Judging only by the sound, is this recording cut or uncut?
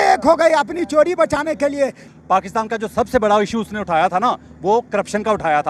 cut